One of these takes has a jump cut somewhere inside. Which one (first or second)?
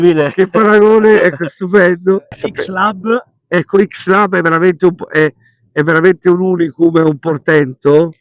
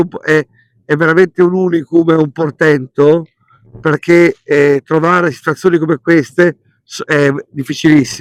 first